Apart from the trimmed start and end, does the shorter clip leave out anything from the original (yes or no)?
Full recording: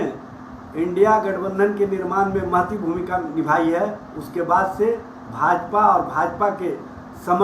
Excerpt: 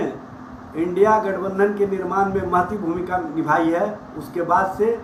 no